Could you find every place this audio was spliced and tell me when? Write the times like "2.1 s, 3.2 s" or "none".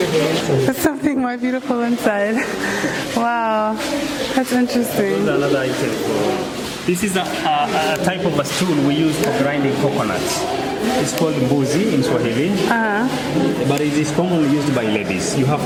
none